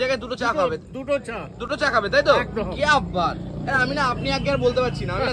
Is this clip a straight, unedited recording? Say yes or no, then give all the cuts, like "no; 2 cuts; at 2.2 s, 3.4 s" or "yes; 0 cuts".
yes; 0 cuts